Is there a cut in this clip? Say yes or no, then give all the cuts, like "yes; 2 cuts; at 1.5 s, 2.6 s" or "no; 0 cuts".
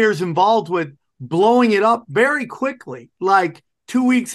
no; 0 cuts